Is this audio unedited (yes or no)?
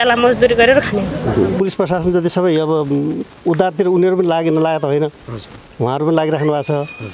no